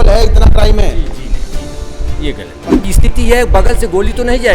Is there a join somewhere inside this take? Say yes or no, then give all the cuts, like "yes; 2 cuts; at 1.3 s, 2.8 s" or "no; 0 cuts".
yes; 1 cut; at 2.8 s